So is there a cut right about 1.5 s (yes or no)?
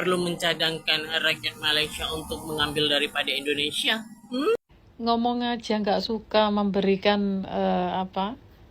no